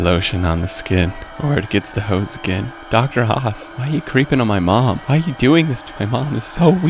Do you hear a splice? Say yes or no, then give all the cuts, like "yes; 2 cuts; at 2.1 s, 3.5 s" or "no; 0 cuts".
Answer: yes; 4 cuts; at 1.2 s, 2.7 s, 3.7 s, 5.0 s